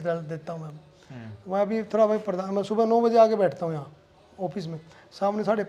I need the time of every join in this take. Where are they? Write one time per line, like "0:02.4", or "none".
none